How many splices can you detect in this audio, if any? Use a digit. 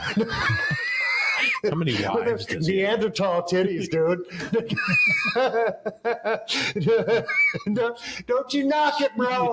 0